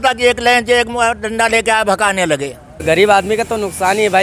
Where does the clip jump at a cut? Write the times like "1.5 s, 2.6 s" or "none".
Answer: 2.8 s